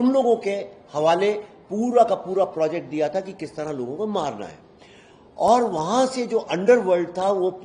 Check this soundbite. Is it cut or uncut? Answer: uncut